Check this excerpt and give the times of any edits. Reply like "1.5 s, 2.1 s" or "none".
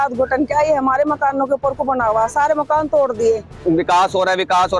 3.6 s